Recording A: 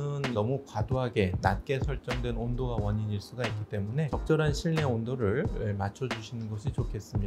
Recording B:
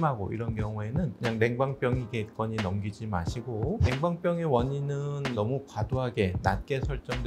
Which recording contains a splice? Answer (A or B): B